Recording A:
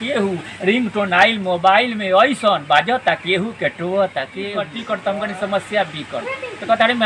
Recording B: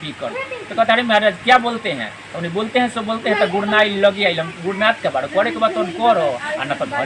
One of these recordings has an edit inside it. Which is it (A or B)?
A